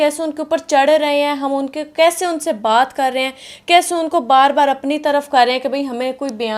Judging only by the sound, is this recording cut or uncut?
uncut